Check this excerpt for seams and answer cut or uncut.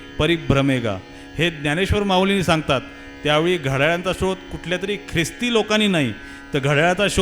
uncut